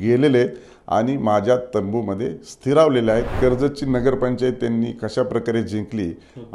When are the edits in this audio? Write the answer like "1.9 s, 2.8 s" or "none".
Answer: 3.3 s